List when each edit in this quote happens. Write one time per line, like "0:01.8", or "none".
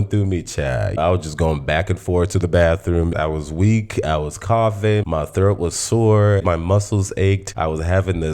0:00.9
0:03.1
0:06.4
0:07.5